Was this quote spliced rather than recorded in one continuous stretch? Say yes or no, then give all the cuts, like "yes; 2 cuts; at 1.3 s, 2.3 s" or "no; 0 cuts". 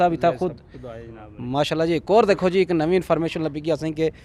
no; 0 cuts